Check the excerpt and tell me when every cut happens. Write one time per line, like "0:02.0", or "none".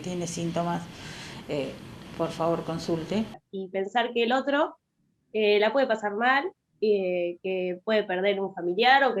0:03.4